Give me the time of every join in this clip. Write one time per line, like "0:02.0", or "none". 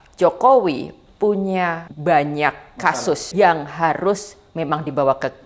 0:01.9
0:03.3